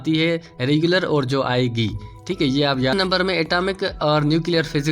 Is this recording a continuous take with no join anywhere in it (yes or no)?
no